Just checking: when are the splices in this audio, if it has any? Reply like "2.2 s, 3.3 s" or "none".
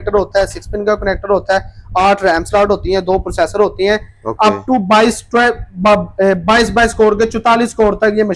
none

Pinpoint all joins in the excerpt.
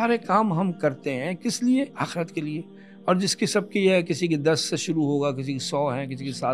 1.9 s

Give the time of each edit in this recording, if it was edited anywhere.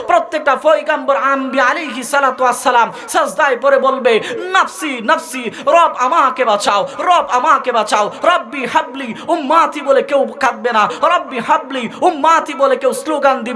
none

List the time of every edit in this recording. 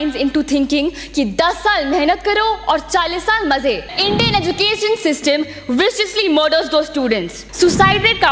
3.9 s, 7.4 s

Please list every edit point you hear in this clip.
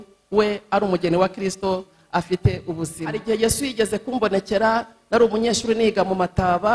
3.2 s

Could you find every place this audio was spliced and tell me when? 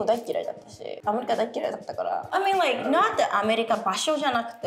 0.9 s, 2.3 s

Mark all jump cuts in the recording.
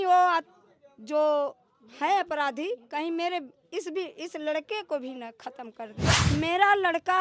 6.1 s

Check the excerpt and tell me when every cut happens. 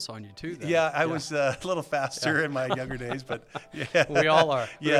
none

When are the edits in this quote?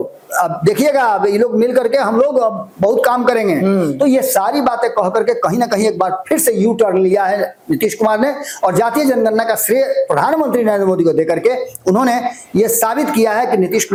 none

